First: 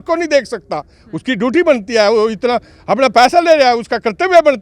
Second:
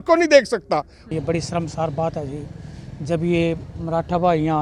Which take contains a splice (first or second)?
second